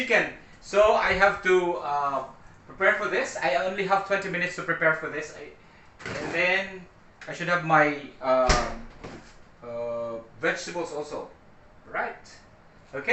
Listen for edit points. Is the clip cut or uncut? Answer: uncut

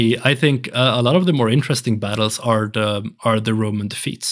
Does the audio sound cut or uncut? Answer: uncut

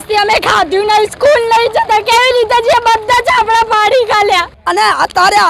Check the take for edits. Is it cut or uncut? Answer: cut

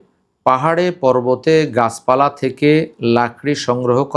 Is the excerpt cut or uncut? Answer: uncut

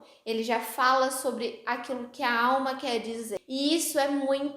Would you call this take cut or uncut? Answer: cut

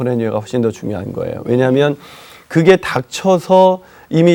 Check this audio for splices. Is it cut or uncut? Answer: uncut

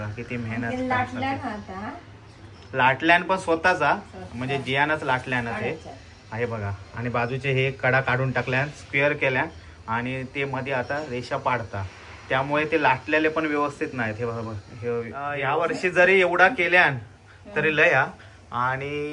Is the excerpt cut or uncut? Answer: uncut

